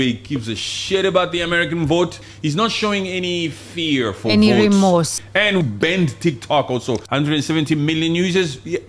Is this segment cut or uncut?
cut